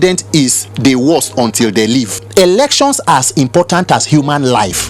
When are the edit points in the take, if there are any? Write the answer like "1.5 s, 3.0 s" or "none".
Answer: 2.2 s